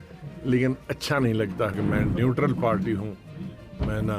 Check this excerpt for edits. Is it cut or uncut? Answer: cut